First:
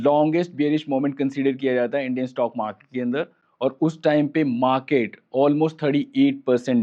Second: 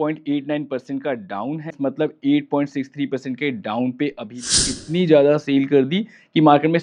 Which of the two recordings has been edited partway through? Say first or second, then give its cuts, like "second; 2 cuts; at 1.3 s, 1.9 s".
second; 2 cuts; at 1.8 s, 4.5 s